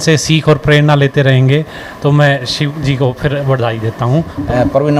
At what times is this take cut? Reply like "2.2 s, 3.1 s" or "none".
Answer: none